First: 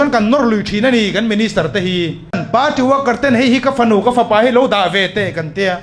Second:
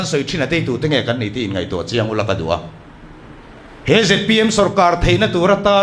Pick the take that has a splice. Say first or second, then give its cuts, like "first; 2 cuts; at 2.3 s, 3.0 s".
first; 1 cut; at 2.4 s